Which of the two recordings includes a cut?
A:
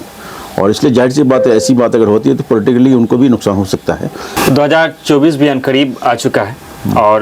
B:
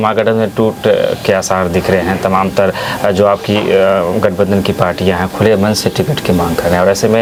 A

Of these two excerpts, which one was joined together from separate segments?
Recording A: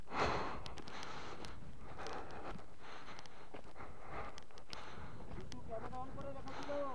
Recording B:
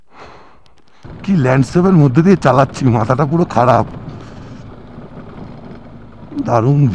B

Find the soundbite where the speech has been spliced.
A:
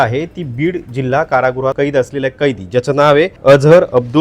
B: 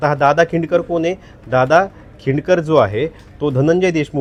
A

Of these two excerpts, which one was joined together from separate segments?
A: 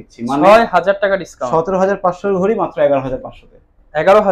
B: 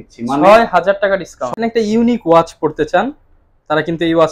B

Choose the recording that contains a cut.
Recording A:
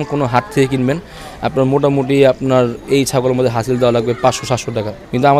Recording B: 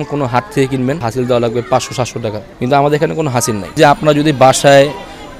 B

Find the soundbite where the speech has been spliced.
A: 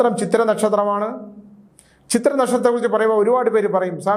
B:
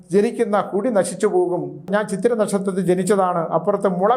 B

